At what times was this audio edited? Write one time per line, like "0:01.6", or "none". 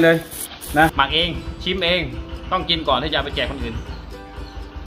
0:00.9